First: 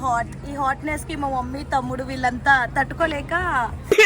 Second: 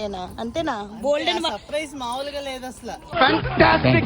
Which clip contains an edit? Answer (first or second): second